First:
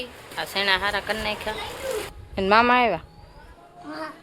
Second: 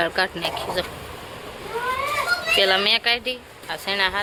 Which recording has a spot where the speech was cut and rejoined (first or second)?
first